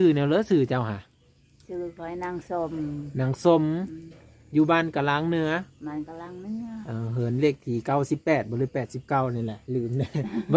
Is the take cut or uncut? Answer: uncut